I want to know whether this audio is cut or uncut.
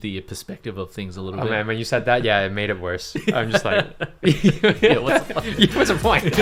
uncut